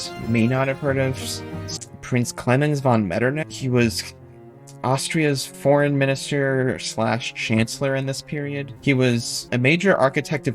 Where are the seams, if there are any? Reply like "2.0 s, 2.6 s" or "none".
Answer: 1.7 s, 3.5 s, 8.9 s